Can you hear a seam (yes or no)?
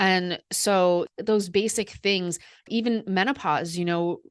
yes